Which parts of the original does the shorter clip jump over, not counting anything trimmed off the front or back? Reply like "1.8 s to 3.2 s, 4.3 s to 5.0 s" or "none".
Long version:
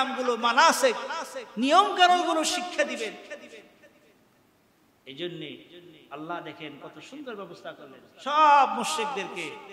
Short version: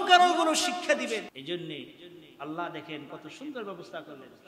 3.2 s to 5.0 s